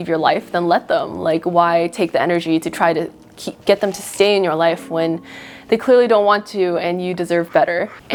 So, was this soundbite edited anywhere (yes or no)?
no